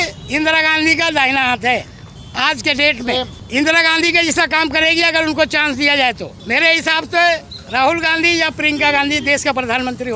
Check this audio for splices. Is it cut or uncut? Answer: uncut